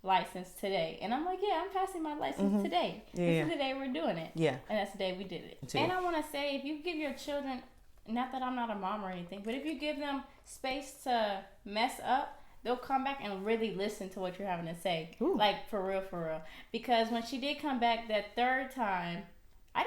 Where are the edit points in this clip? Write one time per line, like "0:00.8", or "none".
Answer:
0:05.6